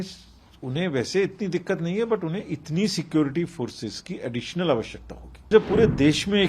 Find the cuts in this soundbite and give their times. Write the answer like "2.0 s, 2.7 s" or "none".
5.5 s